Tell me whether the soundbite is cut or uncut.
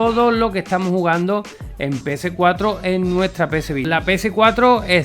cut